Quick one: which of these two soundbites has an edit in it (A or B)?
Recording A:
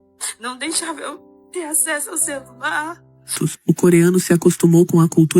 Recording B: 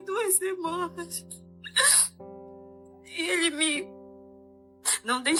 A